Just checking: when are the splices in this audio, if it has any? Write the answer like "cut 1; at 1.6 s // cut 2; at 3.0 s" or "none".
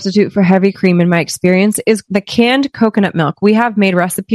cut 1; at 2.0 s